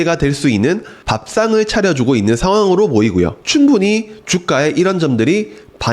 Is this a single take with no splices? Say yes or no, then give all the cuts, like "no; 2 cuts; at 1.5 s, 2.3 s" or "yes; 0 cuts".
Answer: no; 1 cut; at 3.4 s